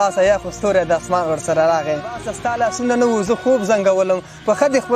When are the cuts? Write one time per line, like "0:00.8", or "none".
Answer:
0:02.4